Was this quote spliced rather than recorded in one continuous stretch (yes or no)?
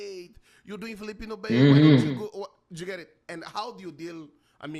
no